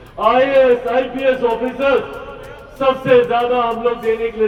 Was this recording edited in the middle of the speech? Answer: no; 0 cuts

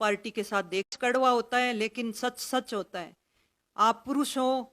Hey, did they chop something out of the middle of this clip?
yes; 1 cut; at 0.9 s

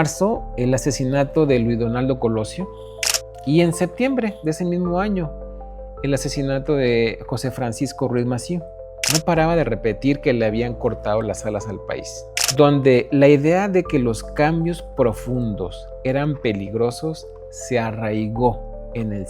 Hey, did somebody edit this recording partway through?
yes; 2 cuts; at 8.9 s, 12.2 s

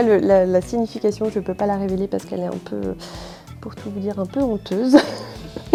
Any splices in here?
no; 0 cuts

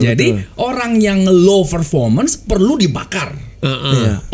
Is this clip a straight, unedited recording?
yes; 0 cuts

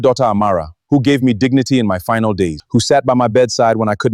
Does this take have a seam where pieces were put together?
yes; 1 cut; at 2.6 s

